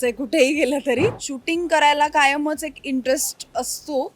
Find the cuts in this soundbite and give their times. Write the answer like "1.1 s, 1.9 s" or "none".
1.3 s

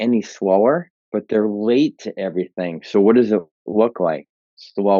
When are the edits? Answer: 1.0 s

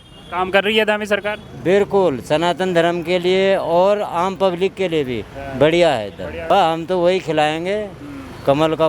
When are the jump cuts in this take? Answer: 6.3 s

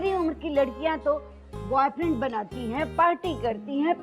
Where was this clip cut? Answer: 2.9 s

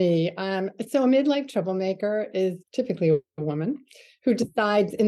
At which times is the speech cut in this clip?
2.6 s

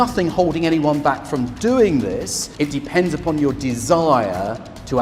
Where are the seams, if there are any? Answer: 2.4 s

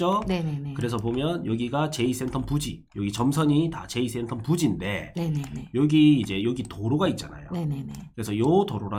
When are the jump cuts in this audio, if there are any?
none

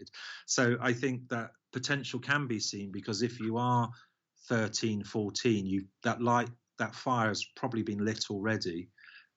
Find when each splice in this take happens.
none

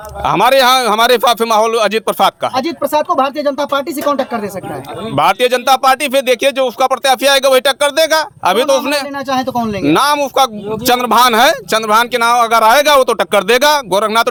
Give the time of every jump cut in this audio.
none

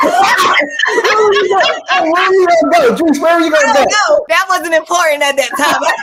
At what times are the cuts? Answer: none

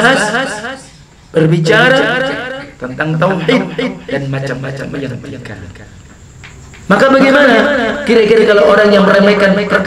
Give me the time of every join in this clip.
5.9 s

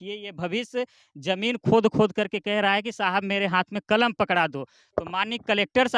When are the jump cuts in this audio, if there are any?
none

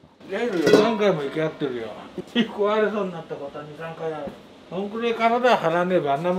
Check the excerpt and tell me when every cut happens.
none

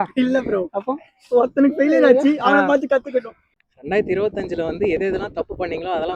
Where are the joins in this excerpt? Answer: 3.5 s

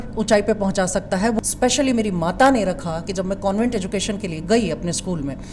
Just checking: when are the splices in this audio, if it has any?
1.4 s

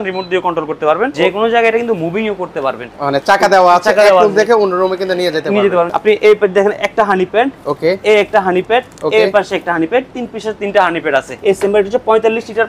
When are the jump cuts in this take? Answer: 1.1 s, 5.9 s, 11.3 s

